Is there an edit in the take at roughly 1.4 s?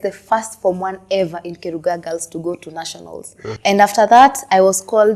no; 1 cut; at 3.5 s

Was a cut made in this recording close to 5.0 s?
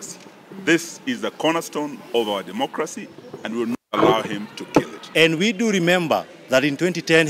yes; 1 cut; at 5.0 s

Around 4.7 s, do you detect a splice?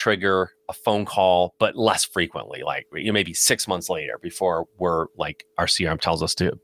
no; 0 cuts

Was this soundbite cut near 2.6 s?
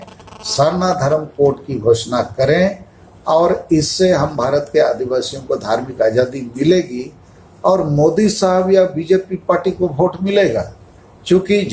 no; 0 cuts

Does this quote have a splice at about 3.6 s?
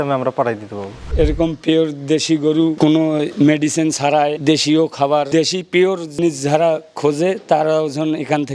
no; 2 cuts; at 1.1 s, 6.2 s

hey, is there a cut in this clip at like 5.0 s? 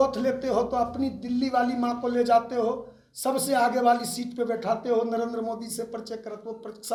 no; 0 cuts

